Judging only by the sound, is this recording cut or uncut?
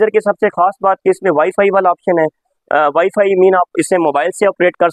uncut